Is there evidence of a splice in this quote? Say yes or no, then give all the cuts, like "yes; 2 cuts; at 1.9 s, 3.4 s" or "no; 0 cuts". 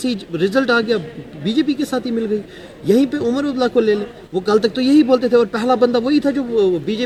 no; 0 cuts